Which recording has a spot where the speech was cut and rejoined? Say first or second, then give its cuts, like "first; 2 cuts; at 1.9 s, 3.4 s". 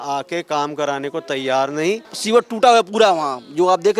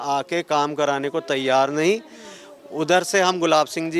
first; 1 cut; at 2.1 s